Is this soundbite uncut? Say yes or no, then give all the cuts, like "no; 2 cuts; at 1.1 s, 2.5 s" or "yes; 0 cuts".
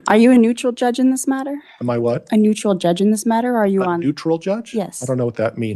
yes; 0 cuts